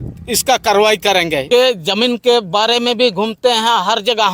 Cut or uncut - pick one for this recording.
cut